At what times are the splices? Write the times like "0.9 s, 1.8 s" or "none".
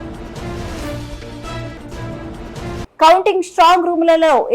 1.4 s